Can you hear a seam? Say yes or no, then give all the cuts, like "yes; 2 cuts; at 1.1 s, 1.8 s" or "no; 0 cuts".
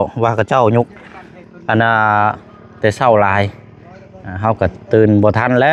no; 0 cuts